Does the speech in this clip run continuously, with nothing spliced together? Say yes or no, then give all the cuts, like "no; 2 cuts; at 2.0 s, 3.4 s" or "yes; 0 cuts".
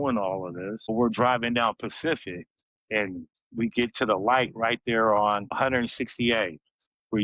no; 2 cuts; at 0.9 s, 2.7 s